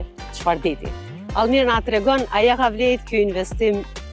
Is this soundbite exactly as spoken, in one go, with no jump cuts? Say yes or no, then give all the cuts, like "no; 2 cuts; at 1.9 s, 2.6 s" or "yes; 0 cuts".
yes; 0 cuts